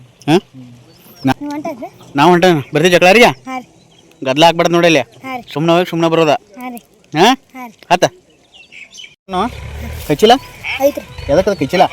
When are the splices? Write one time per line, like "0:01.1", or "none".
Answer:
0:01.3